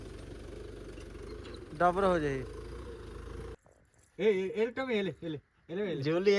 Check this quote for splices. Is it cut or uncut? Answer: cut